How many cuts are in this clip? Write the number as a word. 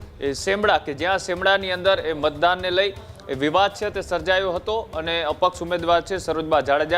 zero